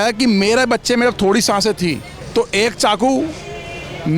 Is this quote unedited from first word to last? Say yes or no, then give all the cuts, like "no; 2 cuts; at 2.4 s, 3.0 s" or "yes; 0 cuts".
no; 1 cut; at 2.1 s